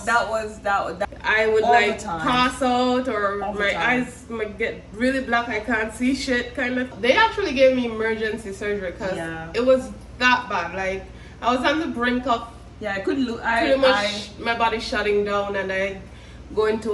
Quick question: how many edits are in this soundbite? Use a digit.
3